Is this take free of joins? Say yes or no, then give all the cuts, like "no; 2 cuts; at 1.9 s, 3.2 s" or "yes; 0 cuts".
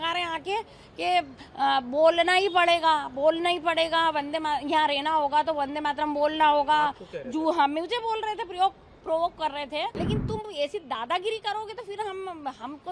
no; 1 cut; at 10.0 s